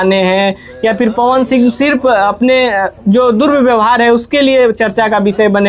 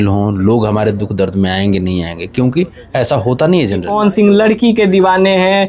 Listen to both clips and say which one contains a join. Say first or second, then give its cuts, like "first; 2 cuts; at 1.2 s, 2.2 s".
second; 1 cut; at 3.9 s